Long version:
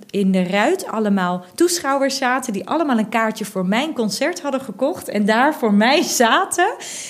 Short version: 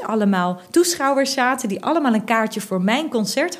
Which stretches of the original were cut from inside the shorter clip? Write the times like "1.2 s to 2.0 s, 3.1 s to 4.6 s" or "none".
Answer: none